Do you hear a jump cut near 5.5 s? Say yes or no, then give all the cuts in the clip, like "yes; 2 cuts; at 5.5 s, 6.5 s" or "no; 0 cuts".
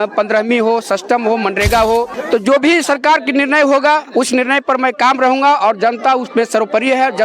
no; 1 cut; at 2.2 s